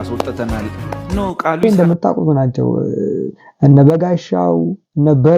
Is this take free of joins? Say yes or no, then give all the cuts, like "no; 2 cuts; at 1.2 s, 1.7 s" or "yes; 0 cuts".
no; 1 cut; at 1.6 s